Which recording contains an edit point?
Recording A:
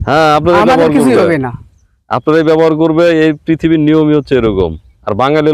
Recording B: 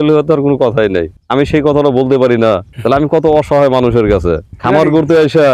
B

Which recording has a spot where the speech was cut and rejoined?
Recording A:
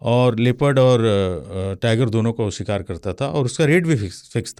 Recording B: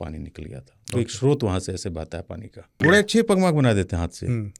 B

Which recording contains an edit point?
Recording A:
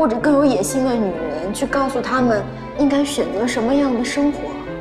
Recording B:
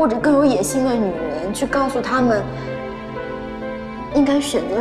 A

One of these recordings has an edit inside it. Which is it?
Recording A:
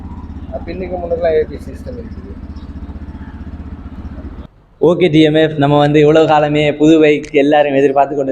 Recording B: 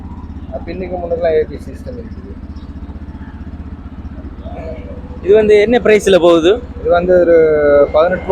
A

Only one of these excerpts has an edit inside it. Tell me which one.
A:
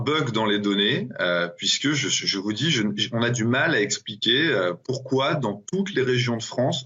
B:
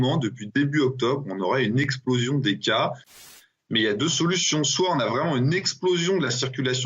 B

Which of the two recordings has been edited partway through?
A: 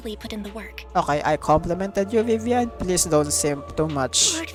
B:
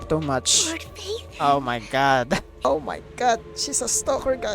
B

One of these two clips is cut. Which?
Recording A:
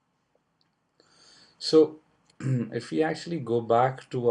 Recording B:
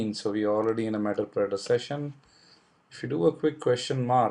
A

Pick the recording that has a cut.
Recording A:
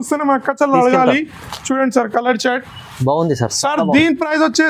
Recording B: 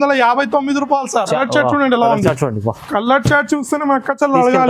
B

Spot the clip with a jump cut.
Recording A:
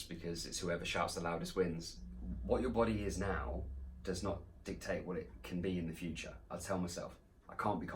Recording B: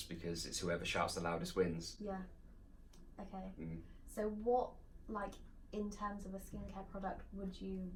A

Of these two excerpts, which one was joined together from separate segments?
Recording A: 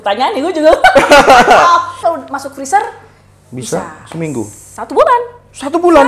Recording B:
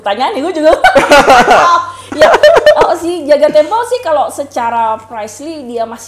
A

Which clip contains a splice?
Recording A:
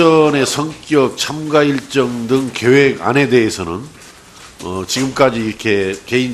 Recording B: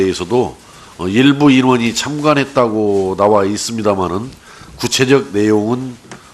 A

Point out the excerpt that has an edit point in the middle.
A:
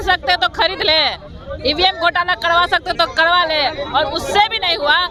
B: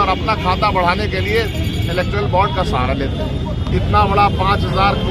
B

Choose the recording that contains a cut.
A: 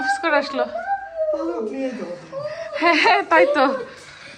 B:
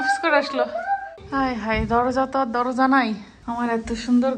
B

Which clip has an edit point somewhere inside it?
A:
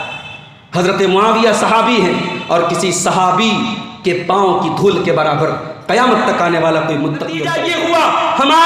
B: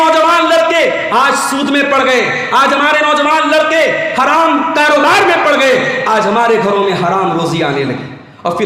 A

